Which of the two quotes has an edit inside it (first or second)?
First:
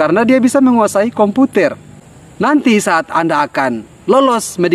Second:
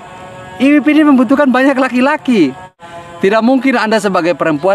first